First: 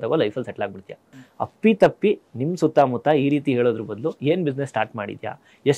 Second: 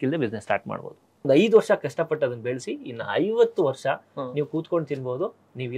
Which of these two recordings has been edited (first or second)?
second